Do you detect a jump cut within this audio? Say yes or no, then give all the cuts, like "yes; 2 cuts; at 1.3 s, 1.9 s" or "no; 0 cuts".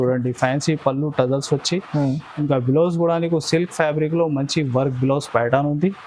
no; 0 cuts